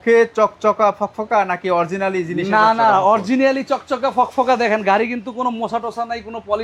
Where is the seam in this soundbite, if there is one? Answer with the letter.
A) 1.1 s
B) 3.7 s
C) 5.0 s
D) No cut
D